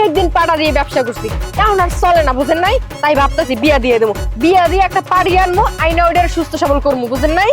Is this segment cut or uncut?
cut